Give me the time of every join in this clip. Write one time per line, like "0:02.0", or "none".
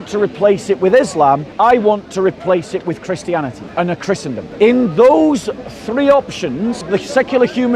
0:01.5
0:03.6
0:04.5
0:06.9